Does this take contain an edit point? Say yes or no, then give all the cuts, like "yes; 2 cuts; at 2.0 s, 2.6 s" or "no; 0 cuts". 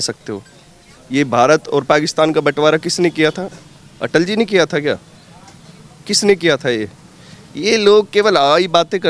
no; 0 cuts